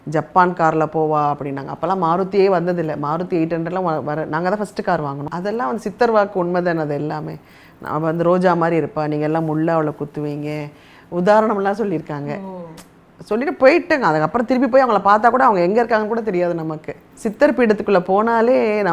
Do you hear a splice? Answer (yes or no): yes